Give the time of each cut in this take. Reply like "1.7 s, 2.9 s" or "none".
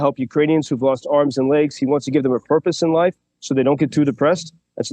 none